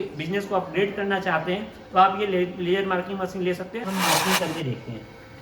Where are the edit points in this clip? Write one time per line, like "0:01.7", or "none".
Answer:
0:03.9